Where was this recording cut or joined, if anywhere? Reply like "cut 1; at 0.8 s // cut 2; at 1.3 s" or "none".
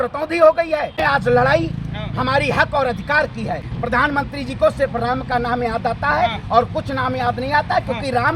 cut 1; at 1.0 s // cut 2; at 3.7 s